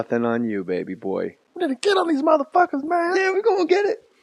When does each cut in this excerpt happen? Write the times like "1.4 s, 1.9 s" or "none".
2.0 s